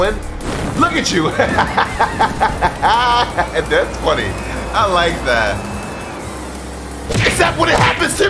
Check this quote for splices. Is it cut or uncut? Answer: uncut